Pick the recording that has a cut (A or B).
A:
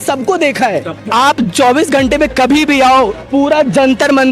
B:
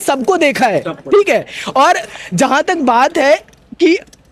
A